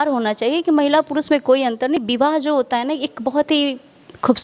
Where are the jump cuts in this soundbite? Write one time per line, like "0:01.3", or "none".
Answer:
0:02.0